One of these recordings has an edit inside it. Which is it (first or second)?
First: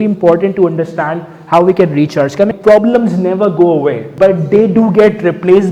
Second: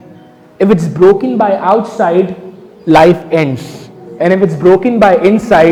first